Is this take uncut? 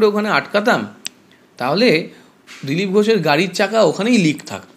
yes; 0 cuts

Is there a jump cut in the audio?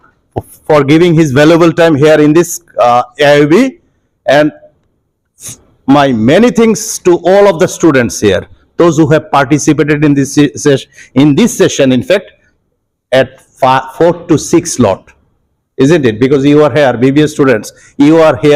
no; 0 cuts

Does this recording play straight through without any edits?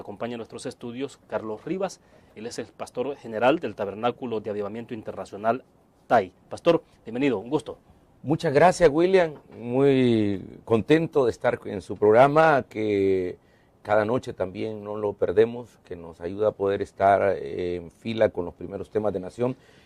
no; 1 cut; at 17.9 s

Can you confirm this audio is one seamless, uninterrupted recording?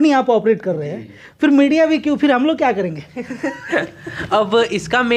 yes; 0 cuts

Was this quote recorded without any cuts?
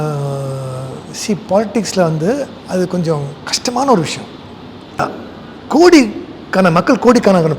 no; 1 cut; at 5.0 s

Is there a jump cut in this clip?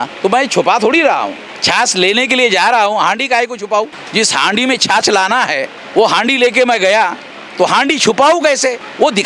no; 0 cuts

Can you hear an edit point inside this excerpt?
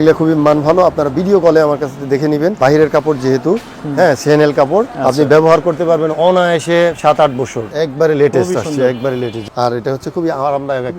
yes; 4 cuts; at 2.6 s, 4.9 s, 7.6 s, 9.4 s

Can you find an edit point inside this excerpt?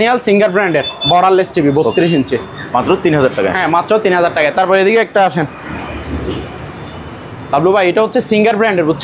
no; 0 cuts

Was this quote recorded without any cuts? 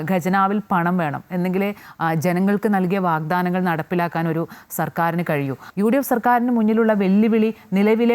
no; 1 cut; at 5.6 s

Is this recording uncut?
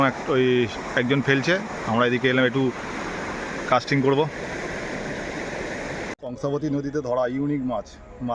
no; 1 cut; at 6.2 s

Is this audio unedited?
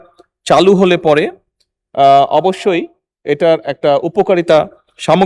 yes; 0 cuts

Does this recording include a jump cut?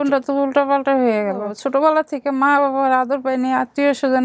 yes; 1 cut; at 1.6 s

